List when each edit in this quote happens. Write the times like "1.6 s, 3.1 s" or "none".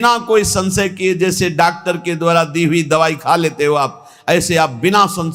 none